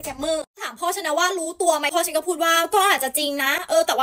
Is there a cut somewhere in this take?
yes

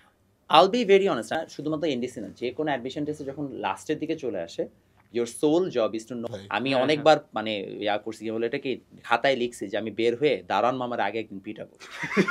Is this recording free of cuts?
no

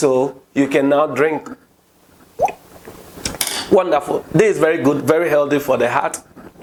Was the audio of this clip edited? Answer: no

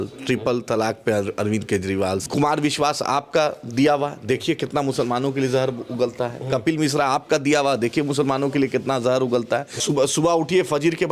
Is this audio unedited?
no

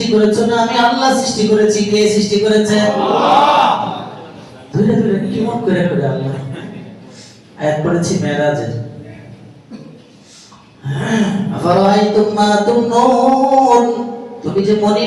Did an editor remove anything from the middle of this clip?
no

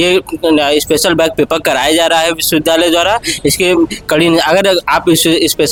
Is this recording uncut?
yes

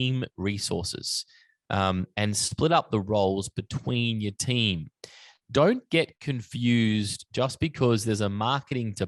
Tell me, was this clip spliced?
no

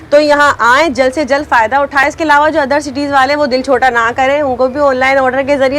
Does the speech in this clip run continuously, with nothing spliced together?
yes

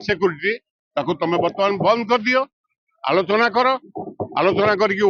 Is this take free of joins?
yes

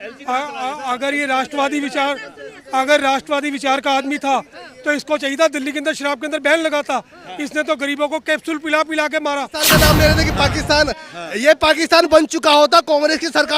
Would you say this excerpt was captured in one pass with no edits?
no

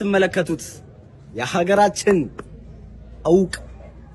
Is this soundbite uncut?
yes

